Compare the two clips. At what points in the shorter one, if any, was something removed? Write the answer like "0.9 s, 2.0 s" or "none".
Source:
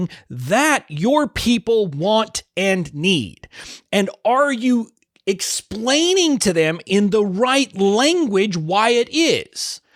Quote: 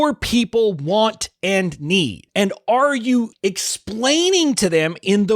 2.2 s, 3.3 s